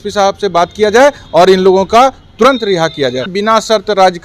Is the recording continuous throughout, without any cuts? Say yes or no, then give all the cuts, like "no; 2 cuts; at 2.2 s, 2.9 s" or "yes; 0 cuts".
no; 1 cut; at 3.3 s